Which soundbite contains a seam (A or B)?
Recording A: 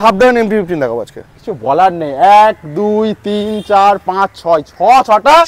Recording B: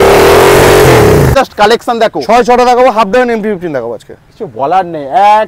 B